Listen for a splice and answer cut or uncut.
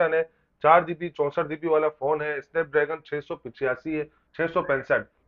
uncut